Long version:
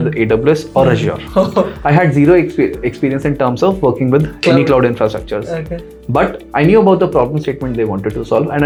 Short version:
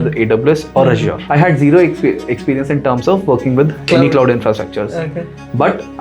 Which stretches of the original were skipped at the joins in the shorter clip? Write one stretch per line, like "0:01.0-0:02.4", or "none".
0:01.2-0:01.8